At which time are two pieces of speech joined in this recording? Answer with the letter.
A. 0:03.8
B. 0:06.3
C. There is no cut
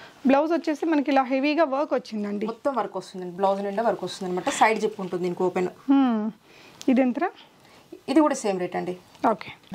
C